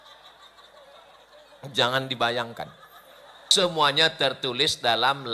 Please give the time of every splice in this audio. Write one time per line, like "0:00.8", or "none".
0:03.4